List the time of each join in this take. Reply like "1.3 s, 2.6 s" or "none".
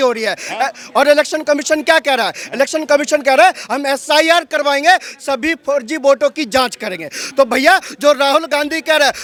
none